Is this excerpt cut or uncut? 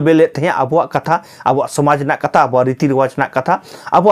uncut